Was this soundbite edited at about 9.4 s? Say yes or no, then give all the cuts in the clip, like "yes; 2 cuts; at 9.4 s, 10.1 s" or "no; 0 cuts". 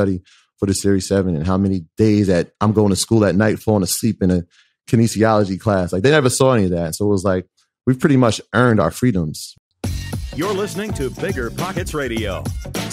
yes; 1 cut; at 9.4 s